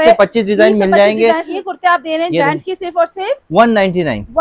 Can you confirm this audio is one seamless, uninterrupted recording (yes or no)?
no